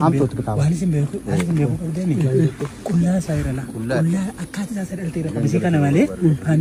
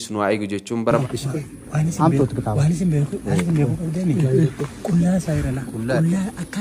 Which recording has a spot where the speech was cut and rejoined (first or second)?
second